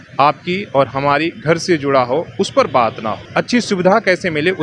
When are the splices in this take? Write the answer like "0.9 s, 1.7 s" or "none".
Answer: 3.2 s